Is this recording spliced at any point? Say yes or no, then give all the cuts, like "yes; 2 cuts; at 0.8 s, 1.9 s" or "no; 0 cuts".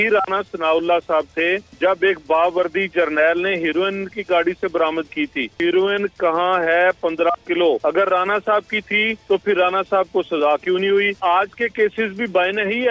yes; 5 cuts; at 1.7 s, 5.6 s, 7.8 s, 9.1 s, 11.2 s